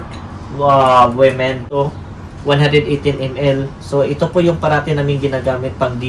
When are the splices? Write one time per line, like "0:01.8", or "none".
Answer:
0:01.6